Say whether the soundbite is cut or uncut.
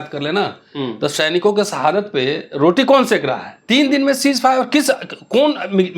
cut